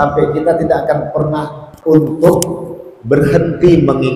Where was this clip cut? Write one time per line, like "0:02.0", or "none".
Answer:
0:01.7